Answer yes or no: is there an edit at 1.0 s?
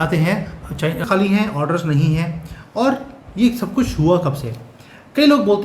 yes